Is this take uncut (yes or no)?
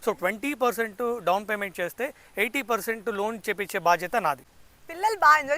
no